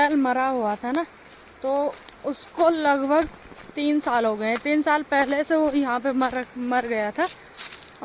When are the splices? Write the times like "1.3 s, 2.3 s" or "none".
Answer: none